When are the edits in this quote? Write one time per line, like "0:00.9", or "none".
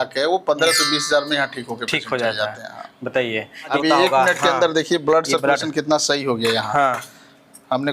0:03.7